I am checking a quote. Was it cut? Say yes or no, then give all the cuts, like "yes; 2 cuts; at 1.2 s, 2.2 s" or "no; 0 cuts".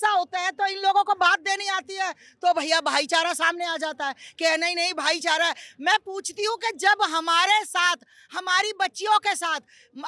no; 0 cuts